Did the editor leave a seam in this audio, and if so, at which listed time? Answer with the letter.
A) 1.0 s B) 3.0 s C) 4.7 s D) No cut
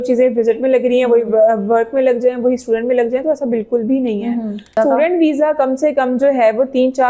C